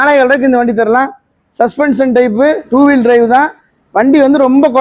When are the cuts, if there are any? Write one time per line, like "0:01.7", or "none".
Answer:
none